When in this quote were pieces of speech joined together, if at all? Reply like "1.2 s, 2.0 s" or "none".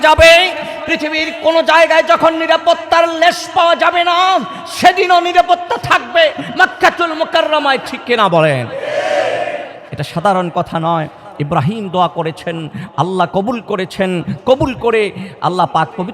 none